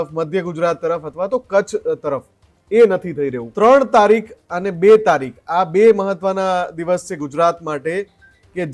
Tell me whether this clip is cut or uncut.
cut